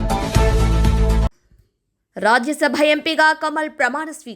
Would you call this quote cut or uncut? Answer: cut